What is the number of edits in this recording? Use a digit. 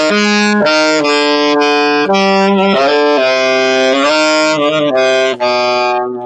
0